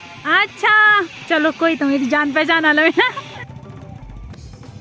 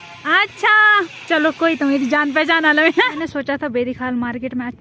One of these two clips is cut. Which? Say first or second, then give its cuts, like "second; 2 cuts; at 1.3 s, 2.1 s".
second; 1 cut; at 3.2 s